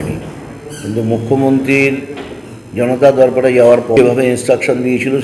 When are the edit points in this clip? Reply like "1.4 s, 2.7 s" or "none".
4.0 s